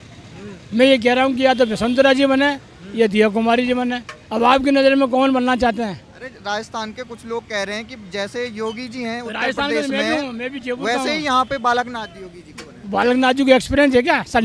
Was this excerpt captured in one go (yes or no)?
yes